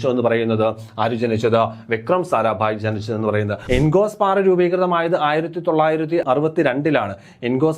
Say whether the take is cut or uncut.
cut